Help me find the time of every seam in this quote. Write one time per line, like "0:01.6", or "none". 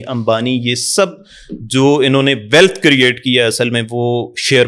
none